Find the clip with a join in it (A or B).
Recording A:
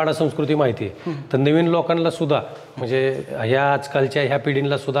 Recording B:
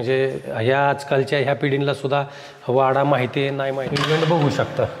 B